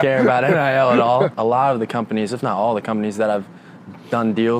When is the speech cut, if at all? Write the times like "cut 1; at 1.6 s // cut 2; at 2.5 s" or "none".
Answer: cut 1; at 1.3 s